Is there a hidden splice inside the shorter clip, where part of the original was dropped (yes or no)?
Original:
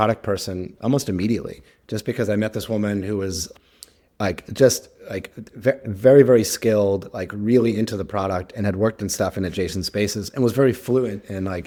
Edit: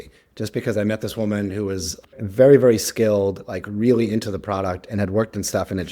yes